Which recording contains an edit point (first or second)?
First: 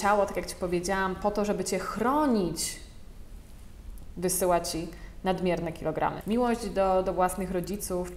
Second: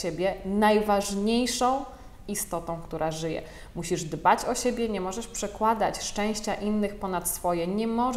first